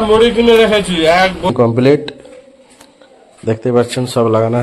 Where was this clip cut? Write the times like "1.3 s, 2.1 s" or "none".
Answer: 1.5 s

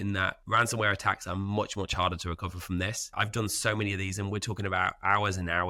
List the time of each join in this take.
none

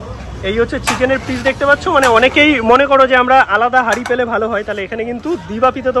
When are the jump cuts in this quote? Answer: none

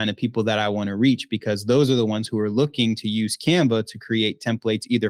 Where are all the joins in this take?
none

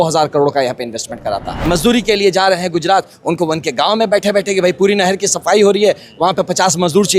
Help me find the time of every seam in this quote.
1.6 s

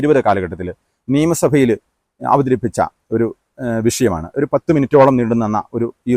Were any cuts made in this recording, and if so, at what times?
none

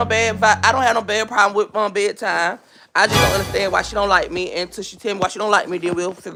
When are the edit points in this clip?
none

